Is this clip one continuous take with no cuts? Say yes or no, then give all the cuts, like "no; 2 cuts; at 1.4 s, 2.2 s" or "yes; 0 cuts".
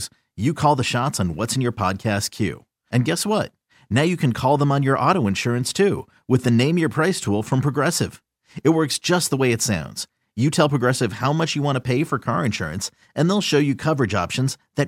yes; 0 cuts